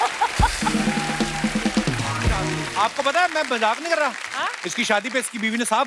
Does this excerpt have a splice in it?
yes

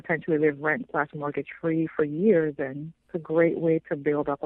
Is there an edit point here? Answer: no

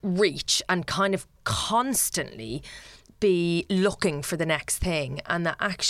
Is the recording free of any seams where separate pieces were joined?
yes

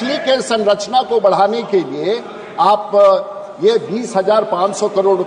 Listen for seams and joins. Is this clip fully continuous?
yes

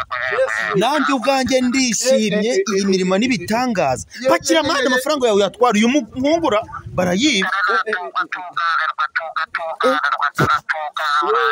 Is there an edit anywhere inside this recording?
no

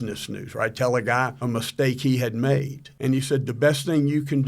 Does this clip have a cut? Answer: yes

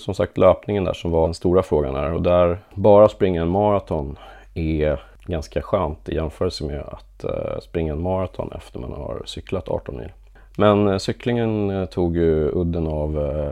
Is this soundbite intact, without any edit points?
no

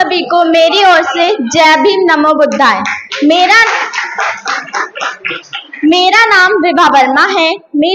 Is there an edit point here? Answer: no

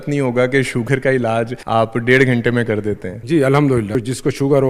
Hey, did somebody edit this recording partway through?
yes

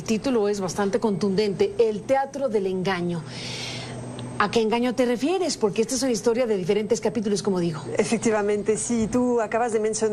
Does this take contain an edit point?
yes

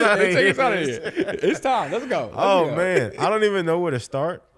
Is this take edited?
no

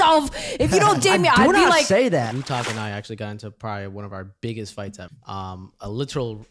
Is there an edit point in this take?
yes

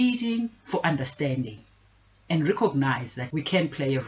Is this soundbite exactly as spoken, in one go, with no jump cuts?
no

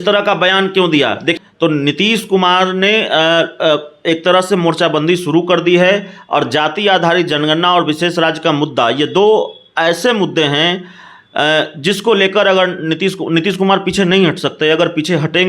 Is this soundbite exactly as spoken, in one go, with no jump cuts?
no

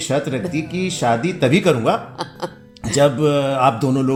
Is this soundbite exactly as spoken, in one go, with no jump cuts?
yes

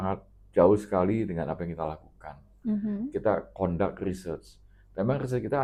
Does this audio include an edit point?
no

